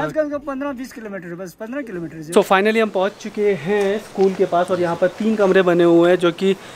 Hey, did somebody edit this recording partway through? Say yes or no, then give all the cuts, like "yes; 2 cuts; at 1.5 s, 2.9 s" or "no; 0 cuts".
yes; 1 cut; at 2.2 s